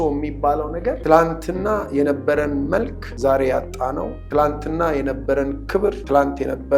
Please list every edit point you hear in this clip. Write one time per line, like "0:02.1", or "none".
0:01.0
0:03.0
0:04.2
0:06.0